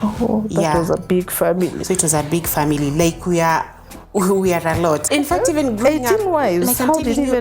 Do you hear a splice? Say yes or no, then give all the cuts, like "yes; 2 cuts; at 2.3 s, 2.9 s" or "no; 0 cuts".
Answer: yes; 1 cut; at 5.0 s